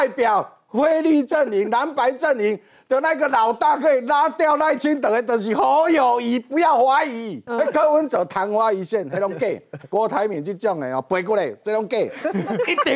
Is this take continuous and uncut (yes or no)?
no